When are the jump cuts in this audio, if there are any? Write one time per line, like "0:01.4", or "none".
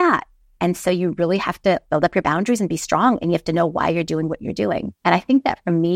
0:01.8
0:04.9